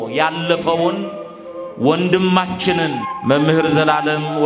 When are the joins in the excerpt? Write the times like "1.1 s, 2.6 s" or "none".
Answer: 3.1 s

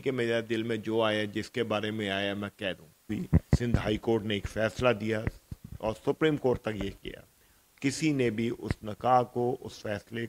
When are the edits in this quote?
3.1 s

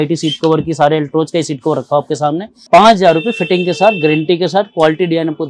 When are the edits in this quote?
2.5 s

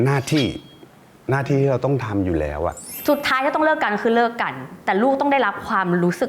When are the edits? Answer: 2.9 s

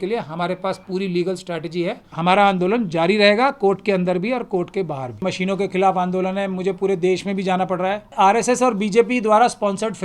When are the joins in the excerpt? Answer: 2.1 s, 5.2 s, 8.1 s

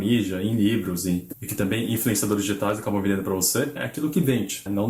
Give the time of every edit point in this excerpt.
none

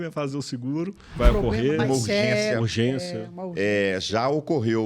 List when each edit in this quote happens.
1.1 s

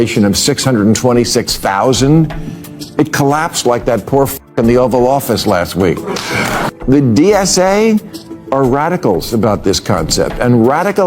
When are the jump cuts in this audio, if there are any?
6.7 s

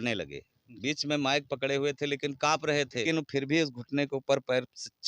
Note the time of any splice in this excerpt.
3.0 s

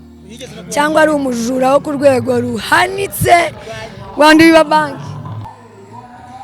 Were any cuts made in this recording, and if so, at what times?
5.4 s

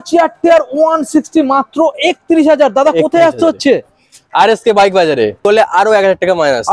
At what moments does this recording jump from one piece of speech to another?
5.4 s

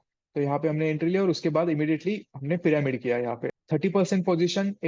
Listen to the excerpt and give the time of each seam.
3.4 s

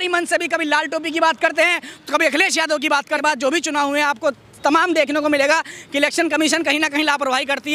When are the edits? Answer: 3.2 s

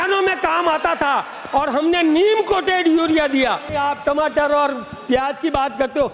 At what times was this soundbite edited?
3.7 s

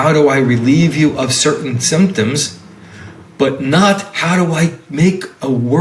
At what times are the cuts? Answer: none

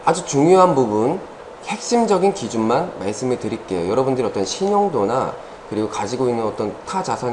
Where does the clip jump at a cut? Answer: 1.5 s

